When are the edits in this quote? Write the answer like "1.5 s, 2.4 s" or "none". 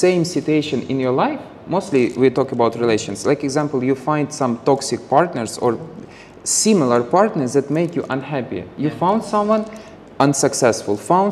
none